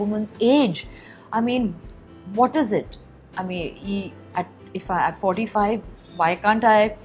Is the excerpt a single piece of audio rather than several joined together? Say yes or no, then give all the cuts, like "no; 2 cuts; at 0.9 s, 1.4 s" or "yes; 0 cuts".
yes; 0 cuts